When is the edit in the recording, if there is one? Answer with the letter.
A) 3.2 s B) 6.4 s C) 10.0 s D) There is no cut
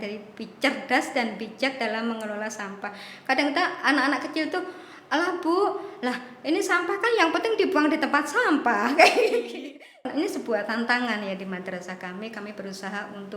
C